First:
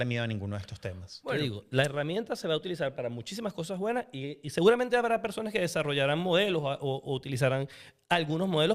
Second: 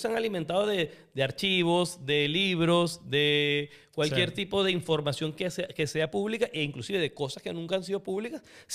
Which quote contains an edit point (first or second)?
first